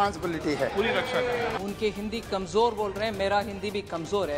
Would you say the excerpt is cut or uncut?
cut